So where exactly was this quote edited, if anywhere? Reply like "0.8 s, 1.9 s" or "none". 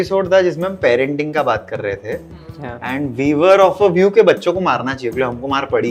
none